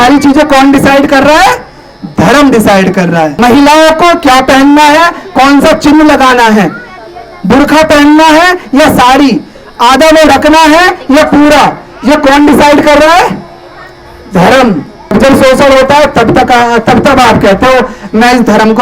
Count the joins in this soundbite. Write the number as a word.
two